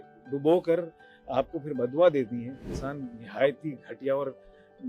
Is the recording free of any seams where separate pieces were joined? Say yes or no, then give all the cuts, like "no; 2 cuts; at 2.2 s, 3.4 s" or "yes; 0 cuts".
no; 1 cut; at 2.8 s